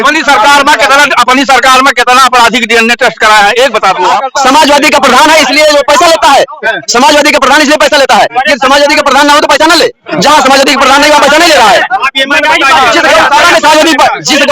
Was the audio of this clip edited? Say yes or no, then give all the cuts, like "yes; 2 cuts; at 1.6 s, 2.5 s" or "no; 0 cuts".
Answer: yes; 1 cut; at 4.2 s